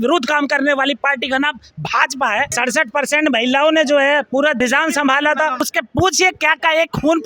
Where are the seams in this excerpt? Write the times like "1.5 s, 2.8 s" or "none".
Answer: 2.5 s, 4.6 s, 5.7 s